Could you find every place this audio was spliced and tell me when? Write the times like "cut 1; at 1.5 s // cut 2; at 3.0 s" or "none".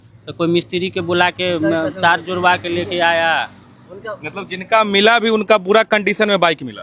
none